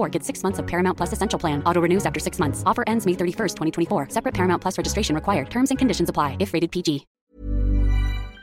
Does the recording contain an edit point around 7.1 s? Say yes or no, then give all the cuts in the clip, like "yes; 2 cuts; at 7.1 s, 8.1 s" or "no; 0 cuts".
yes; 1 cut; at 7.1 s